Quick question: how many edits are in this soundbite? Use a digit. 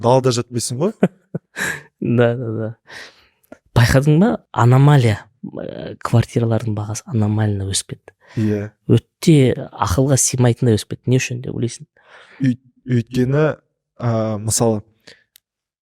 0